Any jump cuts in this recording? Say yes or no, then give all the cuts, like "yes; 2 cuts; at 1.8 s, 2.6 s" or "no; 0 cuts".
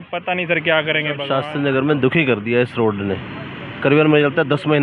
yes; 1 cut; at 1.2 s